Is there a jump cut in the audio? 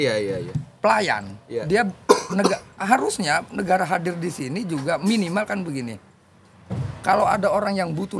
no; 0 cuts

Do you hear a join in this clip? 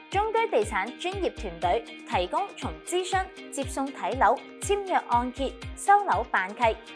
no; 0 cuts

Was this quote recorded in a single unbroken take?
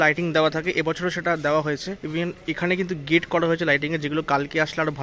yes; 0 cuts

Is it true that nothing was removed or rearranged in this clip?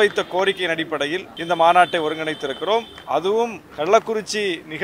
no; 2 cuts; at 1.3 s, 3.6 s

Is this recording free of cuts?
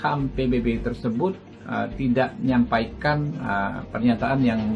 yes; 0 cuts

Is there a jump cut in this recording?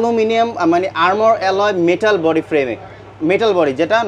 no; 0 cuts

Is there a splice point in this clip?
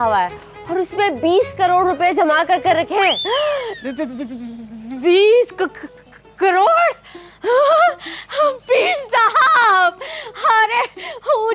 no; 0 cuts

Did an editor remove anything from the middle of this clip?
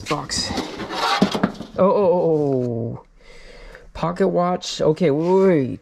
no; 0 cuts

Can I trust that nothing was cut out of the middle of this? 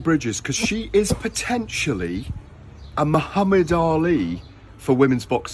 yes; 0 cuts

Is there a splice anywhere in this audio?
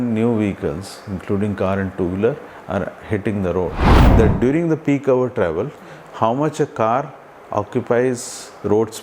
yes; 1 cut; at 4.1 s

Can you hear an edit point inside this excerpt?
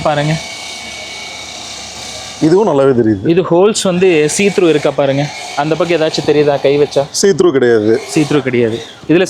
no; 0 cuts

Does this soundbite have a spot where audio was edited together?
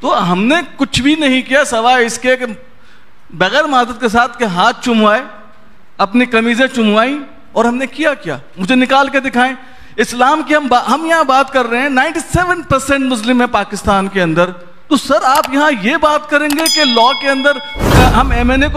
no; 0 cuts

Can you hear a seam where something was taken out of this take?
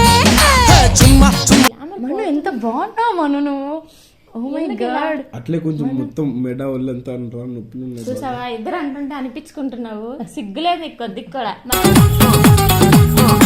yes; 1 cut; at 1.7 s

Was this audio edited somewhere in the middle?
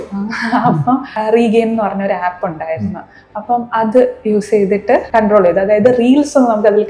yes; 2 cuts; at 1.1 s, 5.1 s

